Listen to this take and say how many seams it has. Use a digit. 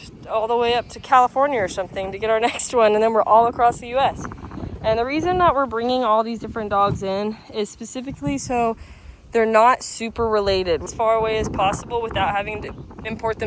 2